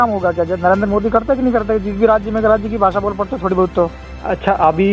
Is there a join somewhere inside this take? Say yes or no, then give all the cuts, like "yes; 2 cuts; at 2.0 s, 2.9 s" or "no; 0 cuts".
no; 0 cuts